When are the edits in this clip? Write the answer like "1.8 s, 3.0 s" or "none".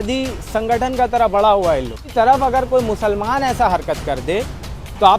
2.0 s